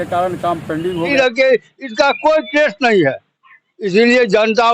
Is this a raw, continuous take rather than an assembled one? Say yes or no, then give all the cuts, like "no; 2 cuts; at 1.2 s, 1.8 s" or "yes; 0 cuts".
no; 1 cut; at 1.1 s